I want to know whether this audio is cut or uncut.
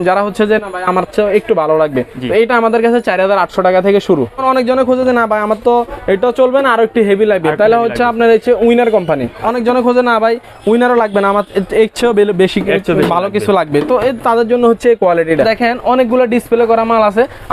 cut